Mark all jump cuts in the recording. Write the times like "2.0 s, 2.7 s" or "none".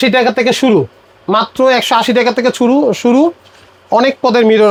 none